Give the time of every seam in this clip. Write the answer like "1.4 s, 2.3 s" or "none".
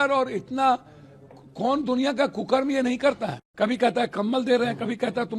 3.7 s